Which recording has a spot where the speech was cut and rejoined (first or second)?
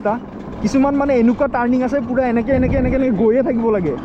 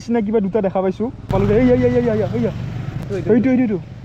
second